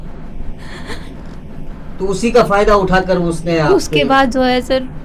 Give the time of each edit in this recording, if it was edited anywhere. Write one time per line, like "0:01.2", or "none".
none

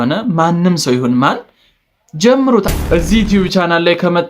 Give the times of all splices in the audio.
0:02.7

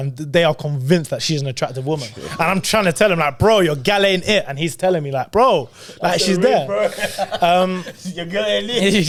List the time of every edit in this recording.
none

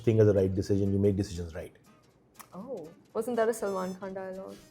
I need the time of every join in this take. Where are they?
0:03.0

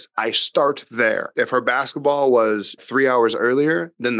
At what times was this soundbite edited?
0:01.3
0:02.8

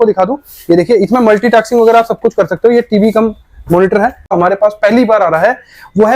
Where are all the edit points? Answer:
0:04.3

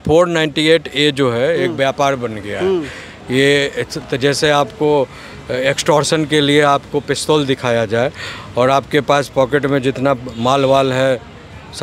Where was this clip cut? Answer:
none

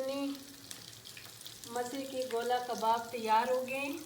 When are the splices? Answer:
none

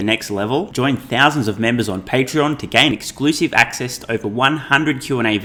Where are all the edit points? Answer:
none

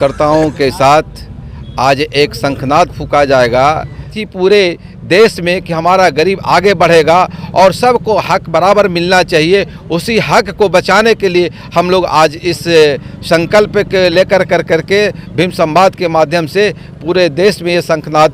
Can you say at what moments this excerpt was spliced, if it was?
0:04.2

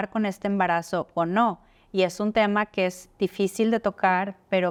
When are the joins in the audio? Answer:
none

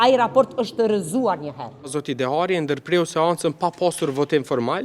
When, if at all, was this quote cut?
0:02.0

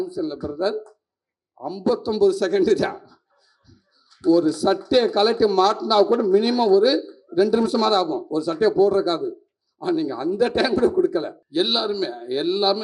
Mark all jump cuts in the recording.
0:11.4

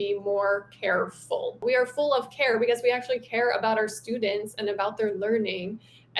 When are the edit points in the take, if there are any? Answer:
0:01.6

